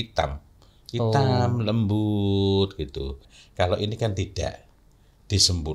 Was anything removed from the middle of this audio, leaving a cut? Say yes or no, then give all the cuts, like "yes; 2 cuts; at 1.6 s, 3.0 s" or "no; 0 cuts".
yes; 1 cut; at 3.2 s